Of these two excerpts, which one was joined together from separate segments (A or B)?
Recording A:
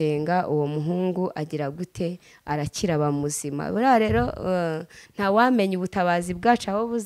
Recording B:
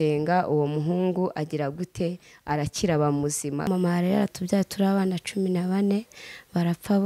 B